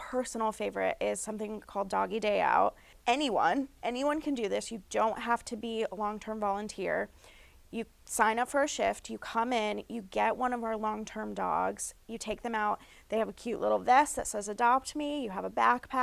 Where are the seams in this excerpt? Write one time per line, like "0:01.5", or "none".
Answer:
0:03.0